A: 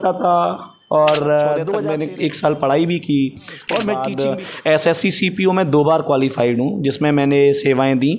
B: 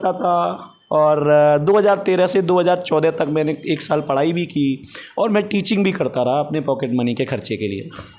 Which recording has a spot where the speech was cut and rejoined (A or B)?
A